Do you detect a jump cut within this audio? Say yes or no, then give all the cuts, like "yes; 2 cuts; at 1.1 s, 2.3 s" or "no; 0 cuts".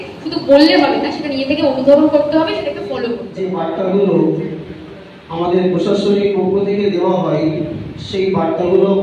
yes; 1 cut; at 3.2 s